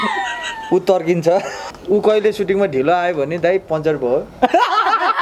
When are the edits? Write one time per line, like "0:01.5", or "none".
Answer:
0:01.6